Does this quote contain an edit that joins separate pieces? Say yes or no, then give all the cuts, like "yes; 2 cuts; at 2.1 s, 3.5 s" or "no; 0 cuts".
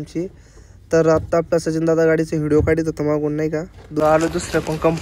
yes; 1 cut; at 4.0 s